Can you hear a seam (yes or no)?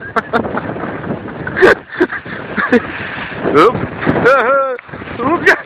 no